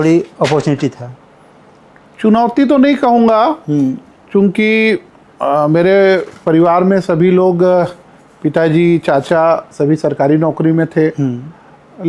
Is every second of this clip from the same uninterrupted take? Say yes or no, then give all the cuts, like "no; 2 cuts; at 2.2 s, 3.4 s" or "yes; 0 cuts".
yes; 0 cuts